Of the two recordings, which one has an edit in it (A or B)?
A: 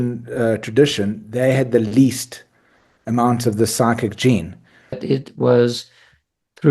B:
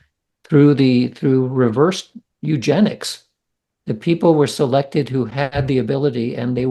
A